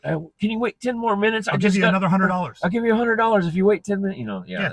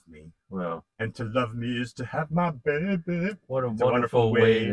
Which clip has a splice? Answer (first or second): second